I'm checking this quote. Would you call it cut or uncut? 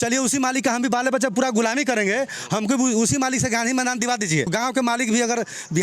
cut